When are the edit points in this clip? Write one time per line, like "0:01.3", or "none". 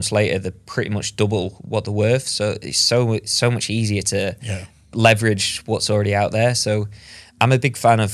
none